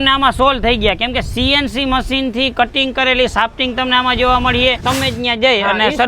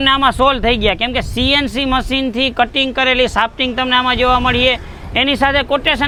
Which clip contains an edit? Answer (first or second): first